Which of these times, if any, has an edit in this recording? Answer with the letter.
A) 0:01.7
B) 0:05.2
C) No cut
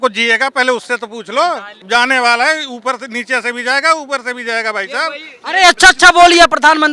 A